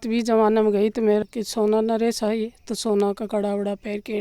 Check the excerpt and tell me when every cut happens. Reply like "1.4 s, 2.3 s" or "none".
1.2 s